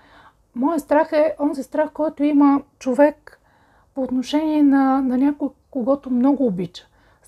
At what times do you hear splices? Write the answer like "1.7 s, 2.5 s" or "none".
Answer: none